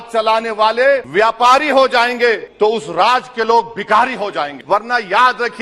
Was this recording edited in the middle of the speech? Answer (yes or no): yes